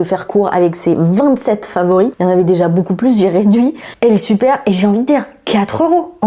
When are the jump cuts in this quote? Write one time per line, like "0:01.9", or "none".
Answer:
0:02.1
0:03.9